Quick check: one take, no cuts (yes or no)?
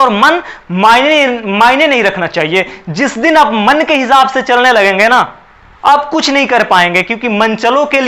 yes